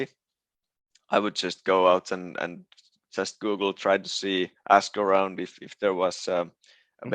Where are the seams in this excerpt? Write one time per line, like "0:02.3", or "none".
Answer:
none